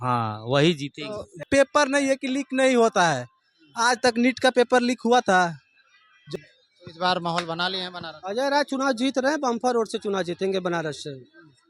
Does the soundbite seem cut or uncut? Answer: cut